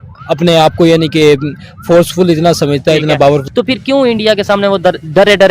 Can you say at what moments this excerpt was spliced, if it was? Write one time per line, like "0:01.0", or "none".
0:03.4